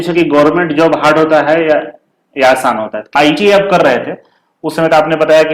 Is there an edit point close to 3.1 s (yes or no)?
yes